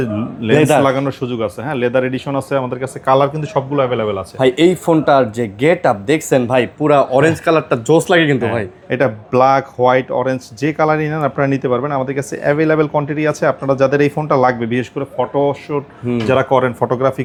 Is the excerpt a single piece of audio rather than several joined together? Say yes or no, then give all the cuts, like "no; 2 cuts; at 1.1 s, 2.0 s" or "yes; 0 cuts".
yes; 0 cuts